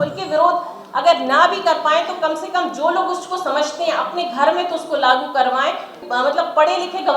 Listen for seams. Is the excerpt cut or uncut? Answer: cut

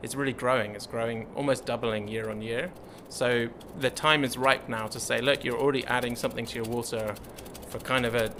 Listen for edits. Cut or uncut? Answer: uncut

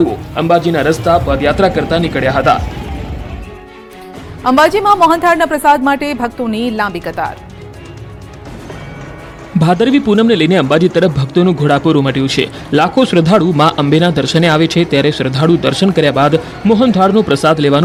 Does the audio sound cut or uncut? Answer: uncut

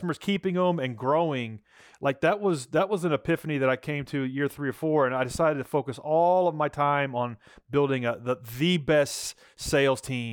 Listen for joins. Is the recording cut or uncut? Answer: uncut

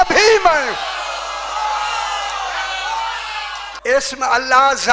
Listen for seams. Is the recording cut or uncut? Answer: cut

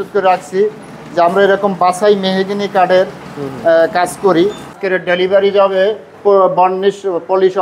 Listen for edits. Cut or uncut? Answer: cut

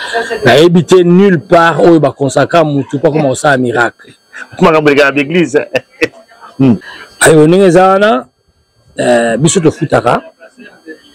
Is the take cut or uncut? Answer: cut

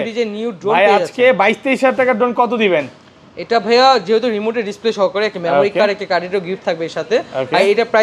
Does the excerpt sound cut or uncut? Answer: uncut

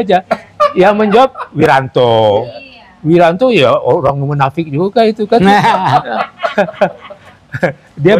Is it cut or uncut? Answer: uncut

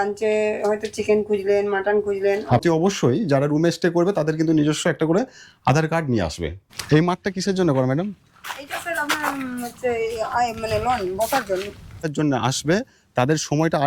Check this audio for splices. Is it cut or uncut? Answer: cut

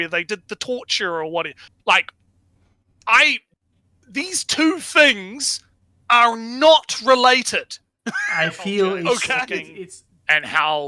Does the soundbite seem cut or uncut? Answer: cut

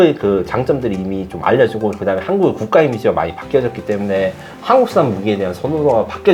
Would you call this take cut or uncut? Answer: uncut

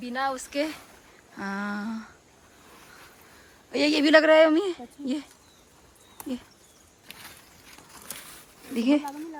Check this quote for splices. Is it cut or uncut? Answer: uncut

